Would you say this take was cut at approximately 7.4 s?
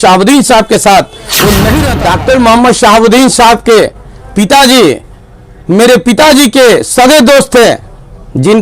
no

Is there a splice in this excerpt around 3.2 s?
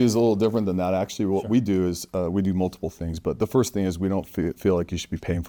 no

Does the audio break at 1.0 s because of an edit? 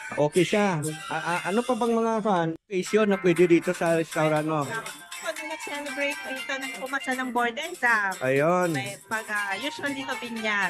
no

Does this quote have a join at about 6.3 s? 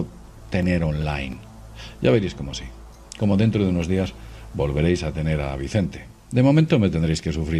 no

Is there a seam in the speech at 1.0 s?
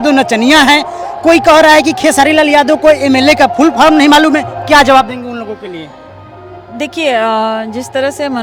no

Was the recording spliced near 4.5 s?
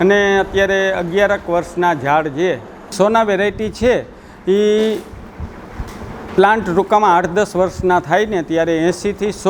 no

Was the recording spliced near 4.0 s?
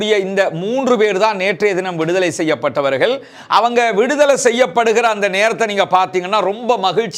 no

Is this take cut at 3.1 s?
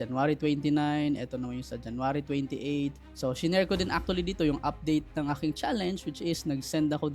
yes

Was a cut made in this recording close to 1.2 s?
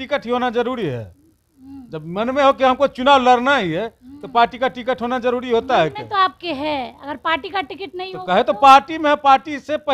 no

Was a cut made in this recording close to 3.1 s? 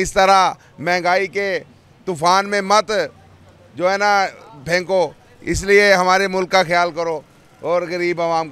no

